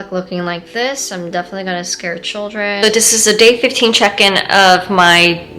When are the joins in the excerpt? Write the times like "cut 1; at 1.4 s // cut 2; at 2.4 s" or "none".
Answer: cut 1; at 2.8 s